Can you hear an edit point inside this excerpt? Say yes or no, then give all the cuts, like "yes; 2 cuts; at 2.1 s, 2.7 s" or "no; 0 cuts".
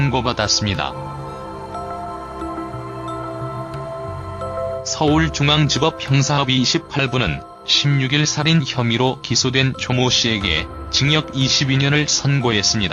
yes; 1 cut; at 6.7 s